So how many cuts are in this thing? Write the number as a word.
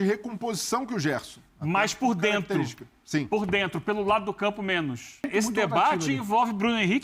one